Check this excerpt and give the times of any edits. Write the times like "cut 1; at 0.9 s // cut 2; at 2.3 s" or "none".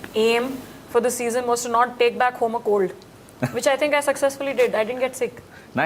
none